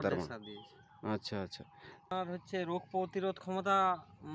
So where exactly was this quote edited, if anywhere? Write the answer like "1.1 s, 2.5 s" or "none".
2.1 s